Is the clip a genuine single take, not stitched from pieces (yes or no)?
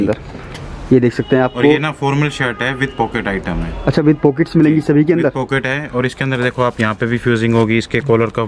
yes